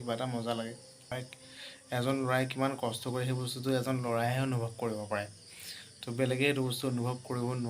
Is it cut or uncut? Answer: cut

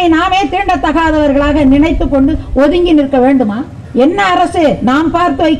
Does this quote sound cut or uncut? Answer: cut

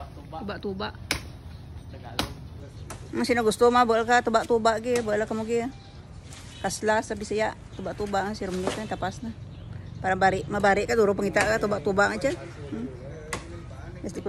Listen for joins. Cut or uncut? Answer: cut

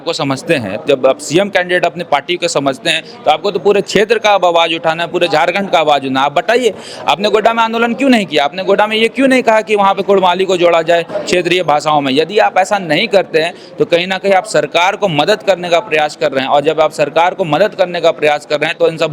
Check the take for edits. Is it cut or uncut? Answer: uncut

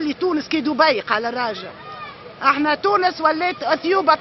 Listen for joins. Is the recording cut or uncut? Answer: uncut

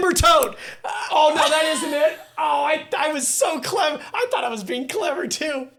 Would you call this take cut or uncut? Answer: uncut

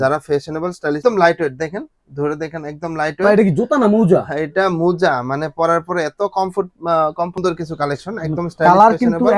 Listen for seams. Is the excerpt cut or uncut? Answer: cut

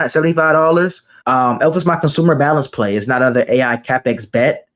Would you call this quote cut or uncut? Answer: cut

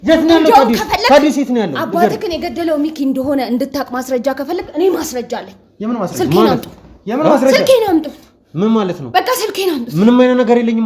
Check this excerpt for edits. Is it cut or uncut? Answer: uncut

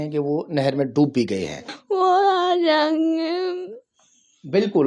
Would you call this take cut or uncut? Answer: cut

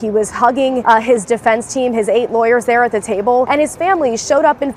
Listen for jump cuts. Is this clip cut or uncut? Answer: cut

